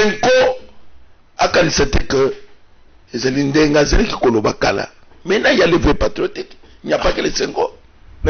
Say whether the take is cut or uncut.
uncut